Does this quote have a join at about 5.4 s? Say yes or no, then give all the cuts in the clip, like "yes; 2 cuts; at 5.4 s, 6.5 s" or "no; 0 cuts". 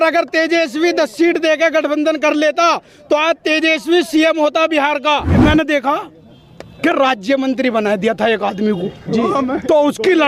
yes; 1 cut; at 5.4 s